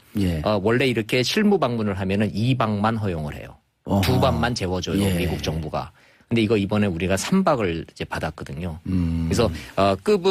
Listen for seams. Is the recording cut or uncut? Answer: uncut